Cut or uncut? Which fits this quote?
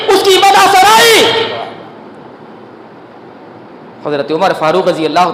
uncut